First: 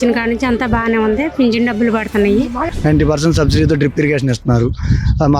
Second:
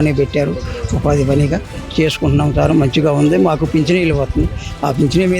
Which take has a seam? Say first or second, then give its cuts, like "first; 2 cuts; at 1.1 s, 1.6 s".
first; 1 cut; at 2.6 s